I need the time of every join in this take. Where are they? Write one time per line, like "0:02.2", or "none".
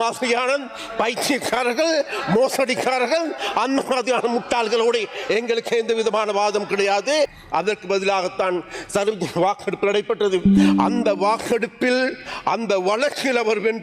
0:07.4

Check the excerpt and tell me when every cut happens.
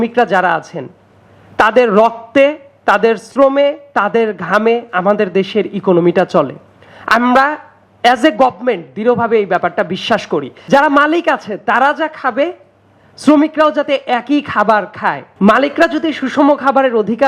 0:10.5
0:15.3

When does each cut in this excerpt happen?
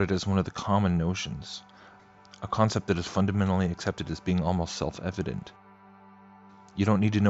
0:02.6

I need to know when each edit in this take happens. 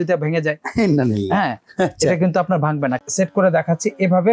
0:03.0

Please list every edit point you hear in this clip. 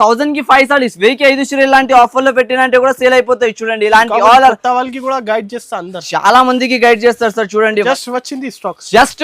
0:07.9

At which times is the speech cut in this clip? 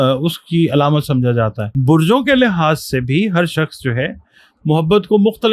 0:01.7

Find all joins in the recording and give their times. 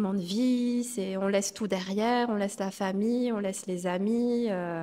none

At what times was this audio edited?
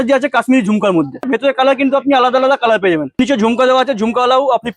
0:01.3
0:03.2

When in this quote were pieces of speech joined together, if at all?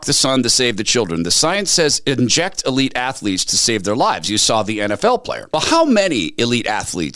none

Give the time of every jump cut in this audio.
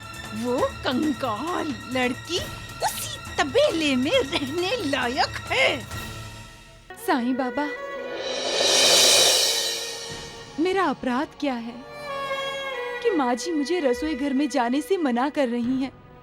0:06.9

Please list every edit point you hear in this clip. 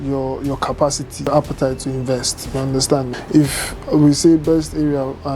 0:01.3
0:03.2

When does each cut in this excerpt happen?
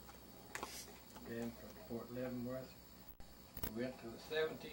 none

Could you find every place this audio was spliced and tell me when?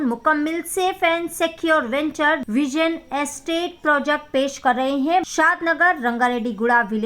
0:02.4
0:05.3

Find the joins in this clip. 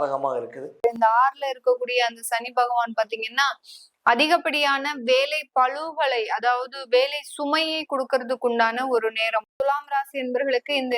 0:00.8
0:09.5

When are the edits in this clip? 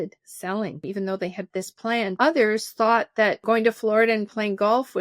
0:00.8
0:02.1
0:03.4

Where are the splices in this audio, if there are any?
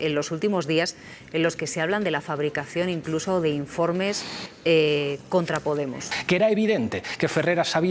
0:06.1

